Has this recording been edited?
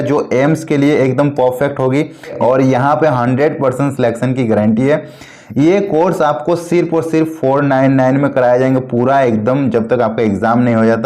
yes; 1 cut; at 2.4 s

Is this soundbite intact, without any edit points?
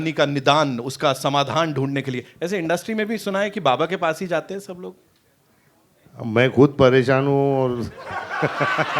yes; 0 cuts

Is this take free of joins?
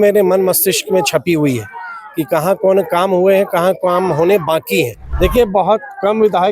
no; 1 cut; at 5.0 s

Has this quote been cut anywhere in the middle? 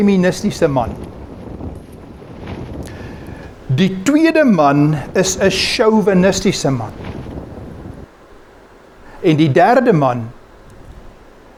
no; 0 cuts

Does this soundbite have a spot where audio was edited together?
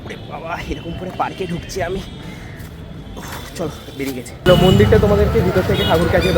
yes; 1 cut; at 4.5 s

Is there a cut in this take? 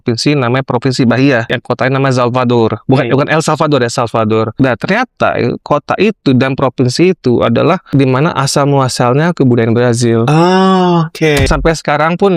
yes; 4 cuts; at 1.5 s, 4.5 s, 7.8 s, 11.4 s

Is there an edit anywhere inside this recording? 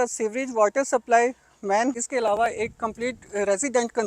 yes; 1 cut; at 2.0 s

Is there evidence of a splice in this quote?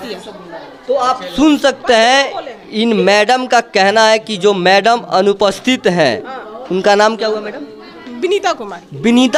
no; 0 cuts

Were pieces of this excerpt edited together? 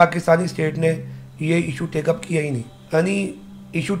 yes; 1 cut; at 2.7 s

